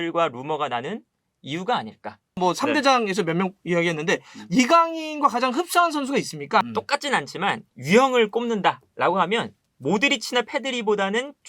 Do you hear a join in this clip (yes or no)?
yes